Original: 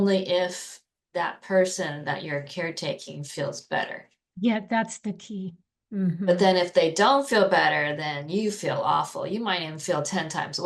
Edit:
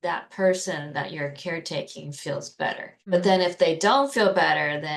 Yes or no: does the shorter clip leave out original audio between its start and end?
yes